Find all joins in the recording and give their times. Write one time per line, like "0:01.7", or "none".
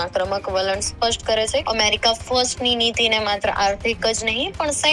0:01.6